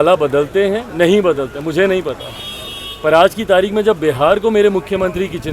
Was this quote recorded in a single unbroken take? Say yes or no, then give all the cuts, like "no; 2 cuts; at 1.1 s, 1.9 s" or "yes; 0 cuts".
yes; 0 cuts